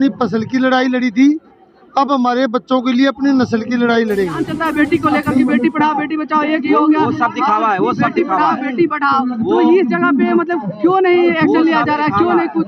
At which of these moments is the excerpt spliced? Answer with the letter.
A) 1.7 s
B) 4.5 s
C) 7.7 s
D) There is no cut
B